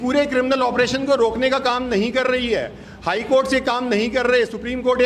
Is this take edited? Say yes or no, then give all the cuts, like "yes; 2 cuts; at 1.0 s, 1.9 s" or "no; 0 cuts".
no; 0 cuts